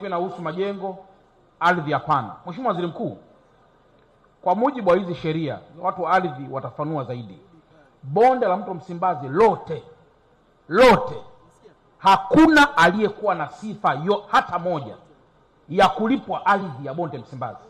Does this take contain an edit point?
no; 0 cuts

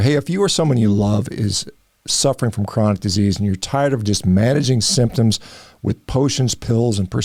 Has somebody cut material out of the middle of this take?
no; 0 cuts

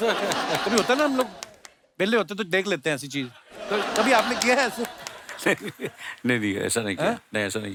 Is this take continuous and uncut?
yes; 0 cuts

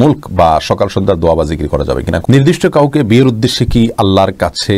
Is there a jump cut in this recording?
yes; 1 cut; at 2.2 s

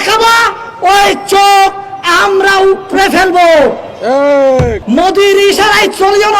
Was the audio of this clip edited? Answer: yes; 1 cut; at 4.8 s

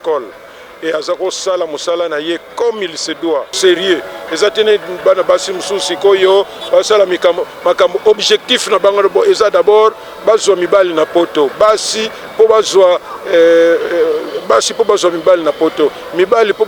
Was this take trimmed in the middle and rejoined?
yes; 1 cut; at 3.5 s

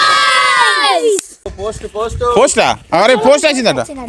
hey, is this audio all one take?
no; 1 cut; at 1.5 s

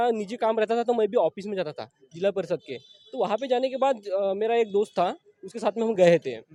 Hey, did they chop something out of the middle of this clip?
no; 0 cuts

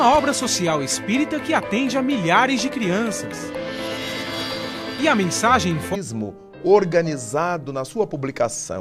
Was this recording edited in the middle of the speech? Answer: no; 0 cuts

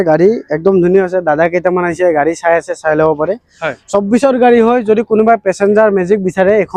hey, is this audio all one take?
yes; 0 cuts

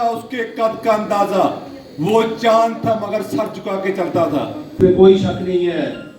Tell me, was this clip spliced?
yes; 1 cut; at 4.8 s

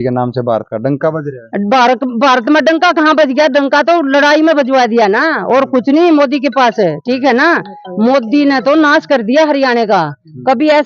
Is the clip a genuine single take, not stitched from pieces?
yes; 0 cuts

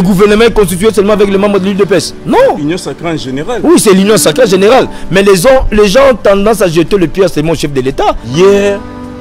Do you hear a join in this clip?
yes; 1 cut; at 8.2 s

